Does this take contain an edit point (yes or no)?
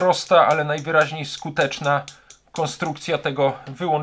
no